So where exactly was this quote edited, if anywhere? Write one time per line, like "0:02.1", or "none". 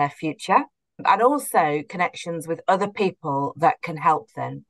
0:01.0